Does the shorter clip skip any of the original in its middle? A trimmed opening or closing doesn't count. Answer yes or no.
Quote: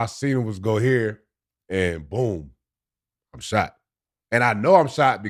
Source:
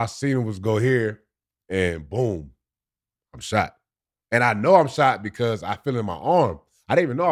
no